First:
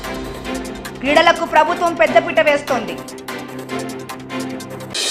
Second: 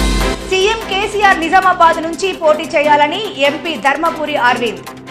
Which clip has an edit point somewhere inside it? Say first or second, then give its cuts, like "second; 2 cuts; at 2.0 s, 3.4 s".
first; 2 cuts; at 1.0 s, 3.4 s